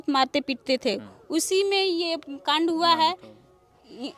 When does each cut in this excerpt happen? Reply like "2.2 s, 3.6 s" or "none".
none